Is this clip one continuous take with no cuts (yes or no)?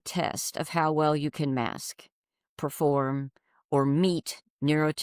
yes